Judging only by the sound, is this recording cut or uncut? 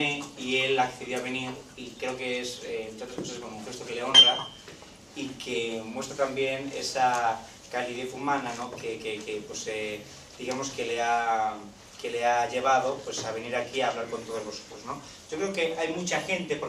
cut